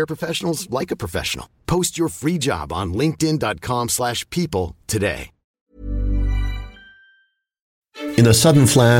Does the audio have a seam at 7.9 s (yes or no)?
yes